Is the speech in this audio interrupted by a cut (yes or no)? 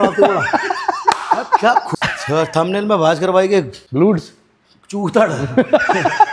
yes